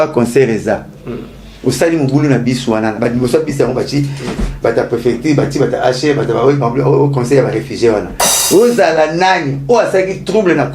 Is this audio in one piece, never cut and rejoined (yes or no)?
no